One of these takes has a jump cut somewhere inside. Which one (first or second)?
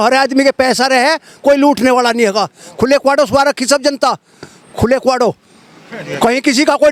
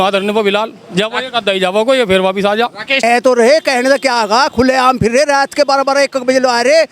second